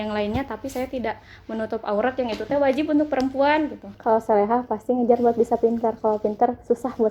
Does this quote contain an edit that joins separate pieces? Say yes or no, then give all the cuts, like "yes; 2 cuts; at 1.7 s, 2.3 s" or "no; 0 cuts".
yes; 1 cut; at 3.8 s